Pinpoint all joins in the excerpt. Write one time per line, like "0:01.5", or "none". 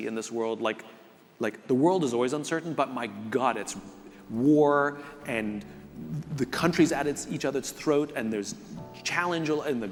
none